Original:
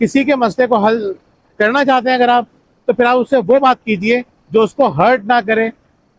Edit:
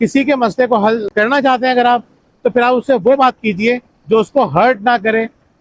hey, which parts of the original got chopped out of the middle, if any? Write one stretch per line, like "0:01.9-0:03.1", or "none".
0:01.1-0:01.5